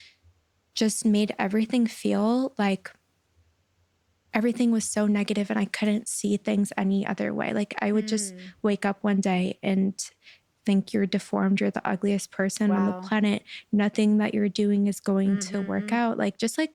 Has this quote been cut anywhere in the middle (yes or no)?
no